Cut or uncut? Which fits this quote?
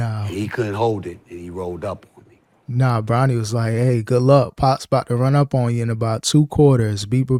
uncut